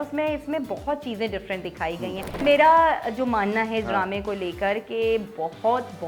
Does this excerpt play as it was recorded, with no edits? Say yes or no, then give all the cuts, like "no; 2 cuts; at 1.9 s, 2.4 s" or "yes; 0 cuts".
no; 1 cut; at 2.4 s